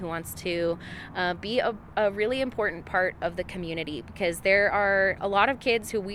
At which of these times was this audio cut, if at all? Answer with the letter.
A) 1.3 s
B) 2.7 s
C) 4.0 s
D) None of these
D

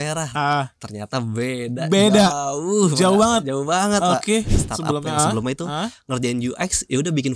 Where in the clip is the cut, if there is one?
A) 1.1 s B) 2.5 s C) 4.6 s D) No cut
C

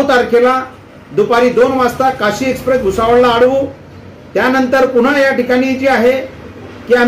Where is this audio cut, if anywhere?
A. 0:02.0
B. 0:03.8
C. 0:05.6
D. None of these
D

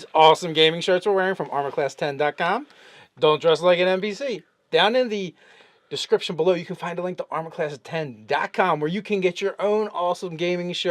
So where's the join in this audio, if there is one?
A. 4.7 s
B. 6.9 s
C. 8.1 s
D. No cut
C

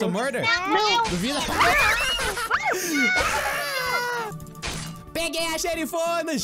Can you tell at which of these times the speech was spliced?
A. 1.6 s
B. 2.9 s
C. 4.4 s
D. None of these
C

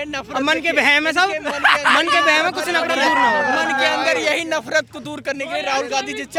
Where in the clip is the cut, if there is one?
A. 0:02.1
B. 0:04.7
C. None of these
C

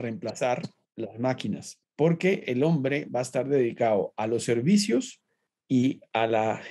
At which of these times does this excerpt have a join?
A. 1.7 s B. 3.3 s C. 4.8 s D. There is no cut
A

